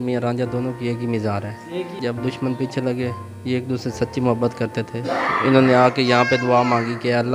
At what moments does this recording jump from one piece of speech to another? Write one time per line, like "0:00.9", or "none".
0:02.0